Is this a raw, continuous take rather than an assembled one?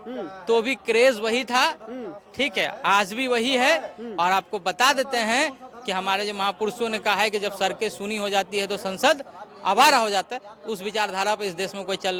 yes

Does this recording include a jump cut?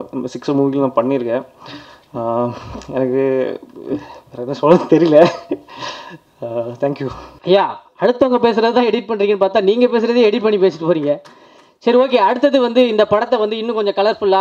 no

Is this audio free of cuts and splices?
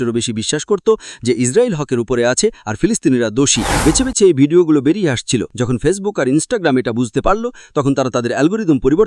no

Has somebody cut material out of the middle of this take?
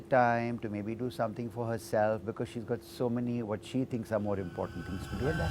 no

